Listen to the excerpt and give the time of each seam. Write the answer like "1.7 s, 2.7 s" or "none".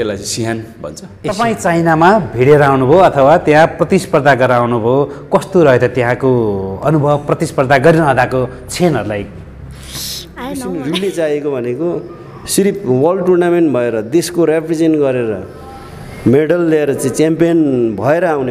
1.2 s, 10.7 s